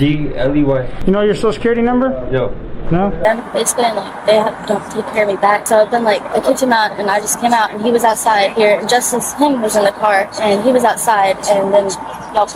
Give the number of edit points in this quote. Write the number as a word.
one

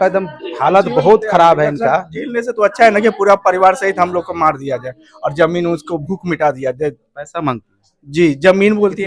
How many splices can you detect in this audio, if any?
zero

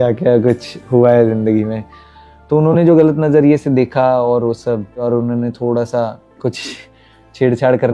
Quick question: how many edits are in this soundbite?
two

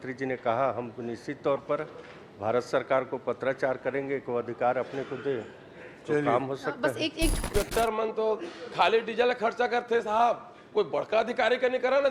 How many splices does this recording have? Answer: one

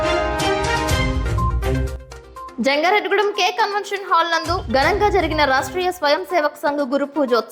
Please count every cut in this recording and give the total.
one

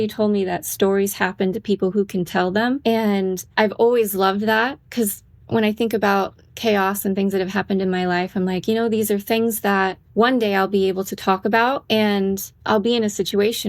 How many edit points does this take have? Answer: four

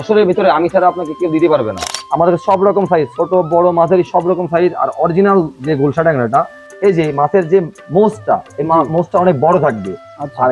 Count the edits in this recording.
two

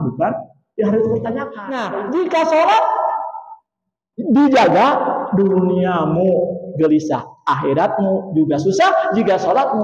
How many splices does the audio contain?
one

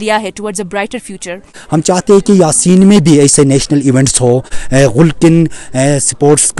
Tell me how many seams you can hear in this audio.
two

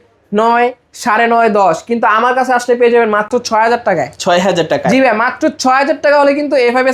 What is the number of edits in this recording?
one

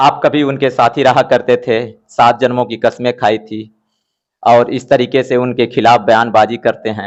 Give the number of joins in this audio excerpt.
zero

